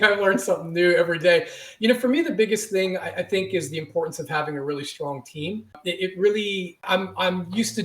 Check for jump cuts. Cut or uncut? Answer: cut